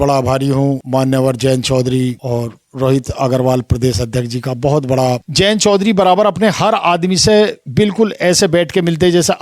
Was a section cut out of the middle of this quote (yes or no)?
yes